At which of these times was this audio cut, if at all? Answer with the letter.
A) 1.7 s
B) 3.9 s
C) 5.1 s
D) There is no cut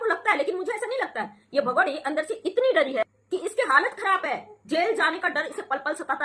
D